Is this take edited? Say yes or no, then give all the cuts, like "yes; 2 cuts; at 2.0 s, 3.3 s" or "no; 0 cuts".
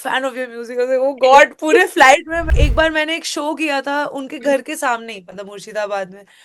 yes; 1 cut; at 2.4 s